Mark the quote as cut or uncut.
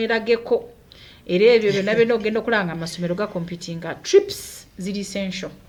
uncut